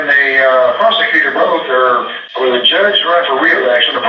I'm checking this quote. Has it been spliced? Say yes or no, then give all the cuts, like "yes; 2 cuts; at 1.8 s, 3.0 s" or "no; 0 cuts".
yes; 1 cut; at 2.2 s